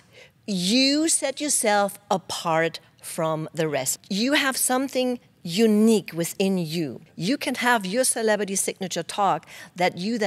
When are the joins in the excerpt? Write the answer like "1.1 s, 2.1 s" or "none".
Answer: 3.9 s, 7.1 s

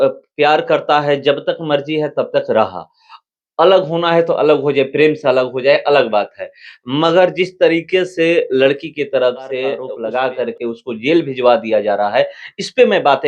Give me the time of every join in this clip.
9.9 s

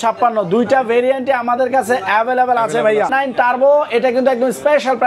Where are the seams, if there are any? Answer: 3.1 s

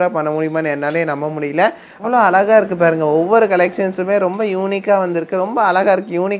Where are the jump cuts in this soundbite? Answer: 1.9 s

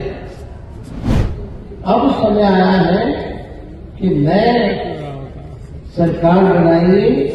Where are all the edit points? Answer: 1.2 s

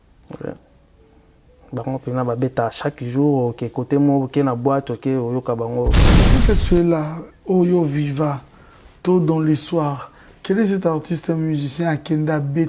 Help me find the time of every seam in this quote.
6.3 s

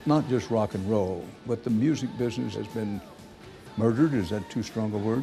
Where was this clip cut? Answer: 1.3 s, 2.5 s

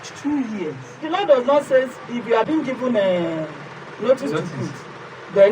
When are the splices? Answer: 0.9 s, 2.5 s

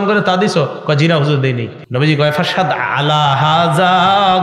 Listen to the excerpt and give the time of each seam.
1.8 s

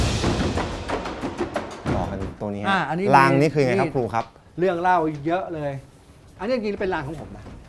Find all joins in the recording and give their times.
2.0 s

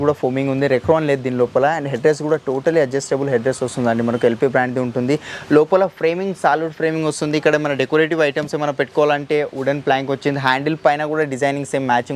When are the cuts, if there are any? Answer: none

